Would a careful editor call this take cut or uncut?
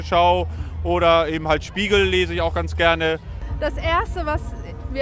cut